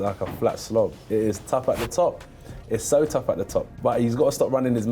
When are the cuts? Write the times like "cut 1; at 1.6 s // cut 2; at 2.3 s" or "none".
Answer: cut 1; at 1.1 s // cut 2; at 3.7 s